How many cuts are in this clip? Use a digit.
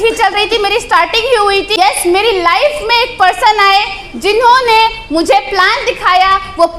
1